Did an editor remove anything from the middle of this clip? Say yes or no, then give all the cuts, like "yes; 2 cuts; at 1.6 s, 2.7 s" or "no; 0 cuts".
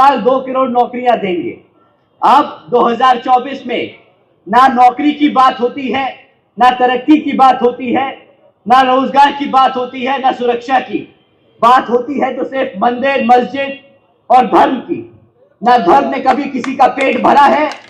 no; 0 cuts